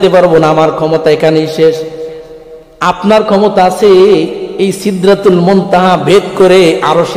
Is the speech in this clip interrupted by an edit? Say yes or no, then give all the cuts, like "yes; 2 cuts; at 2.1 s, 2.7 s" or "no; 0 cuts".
no; 0 cuts